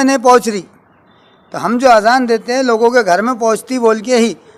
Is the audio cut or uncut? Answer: uncut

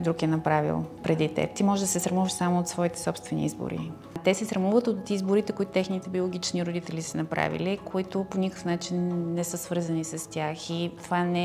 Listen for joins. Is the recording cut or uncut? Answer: cut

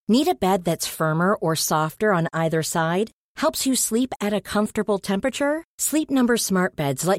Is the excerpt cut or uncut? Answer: uncut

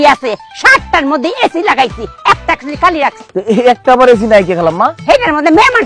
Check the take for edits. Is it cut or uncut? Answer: uncut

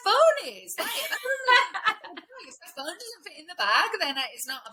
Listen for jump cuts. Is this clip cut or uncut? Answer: uncut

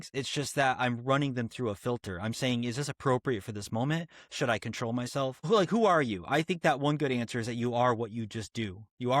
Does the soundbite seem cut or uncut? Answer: cut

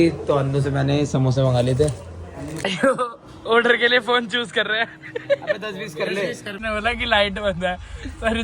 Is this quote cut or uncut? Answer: cut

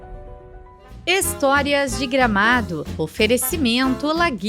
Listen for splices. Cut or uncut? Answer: cut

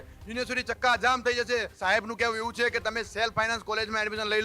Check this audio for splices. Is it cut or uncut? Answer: cut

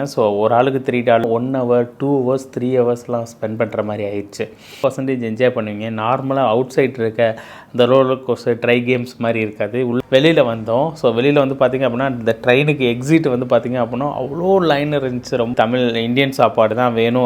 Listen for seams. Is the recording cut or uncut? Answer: cut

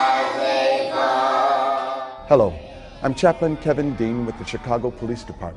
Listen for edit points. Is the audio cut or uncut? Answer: cut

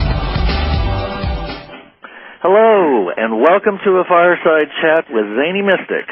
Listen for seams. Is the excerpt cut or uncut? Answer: cut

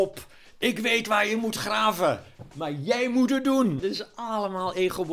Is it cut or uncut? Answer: cut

